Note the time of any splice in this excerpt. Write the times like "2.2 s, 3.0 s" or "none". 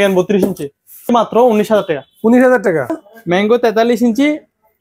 1.1 s, 2.9 s